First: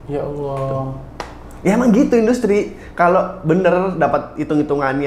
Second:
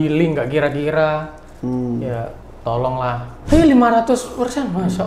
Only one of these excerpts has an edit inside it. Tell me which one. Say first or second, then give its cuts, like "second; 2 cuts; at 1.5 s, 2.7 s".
second; 1 cut; at 3.3 s